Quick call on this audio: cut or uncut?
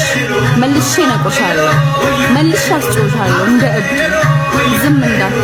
uncut